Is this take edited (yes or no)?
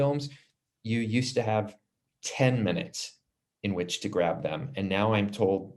no